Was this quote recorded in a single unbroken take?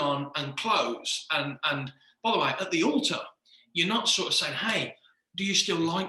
yes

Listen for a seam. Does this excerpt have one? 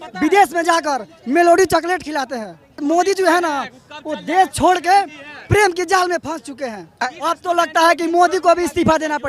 yes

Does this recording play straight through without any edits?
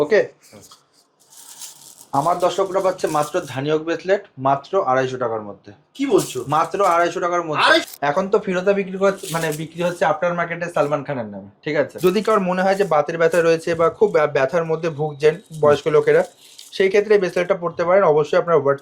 no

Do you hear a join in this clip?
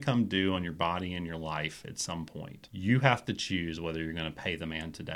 yes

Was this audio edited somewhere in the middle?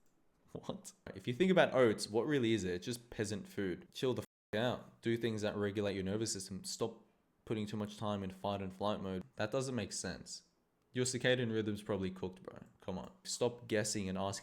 yes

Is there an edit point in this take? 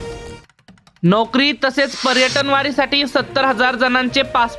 yes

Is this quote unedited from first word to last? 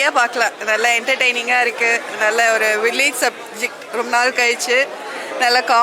yes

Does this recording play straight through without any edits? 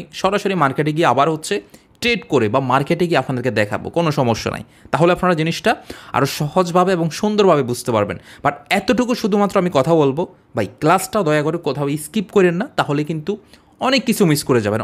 yes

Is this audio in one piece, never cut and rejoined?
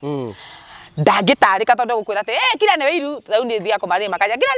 yes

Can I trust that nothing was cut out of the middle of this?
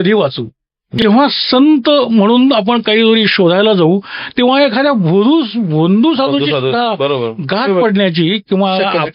no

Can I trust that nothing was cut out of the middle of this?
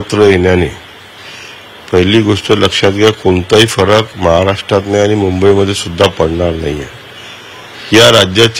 yes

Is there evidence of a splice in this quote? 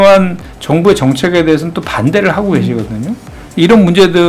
no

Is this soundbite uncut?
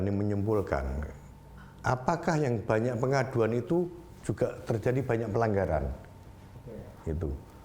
yes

